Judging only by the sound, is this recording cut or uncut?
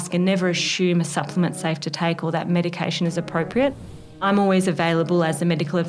cut